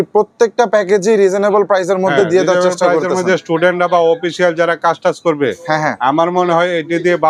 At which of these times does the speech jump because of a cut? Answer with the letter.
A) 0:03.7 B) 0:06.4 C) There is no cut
C